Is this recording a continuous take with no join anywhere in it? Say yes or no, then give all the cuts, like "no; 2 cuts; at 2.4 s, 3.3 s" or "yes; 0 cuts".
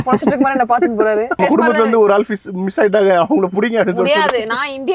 no; 1 cut; at 1.4 s